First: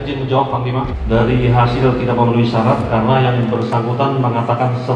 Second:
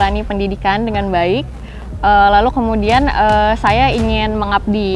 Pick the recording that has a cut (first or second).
first